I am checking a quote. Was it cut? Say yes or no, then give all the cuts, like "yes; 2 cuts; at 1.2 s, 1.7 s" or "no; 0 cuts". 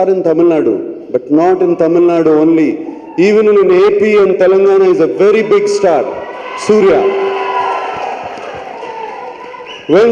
no; 0 cuts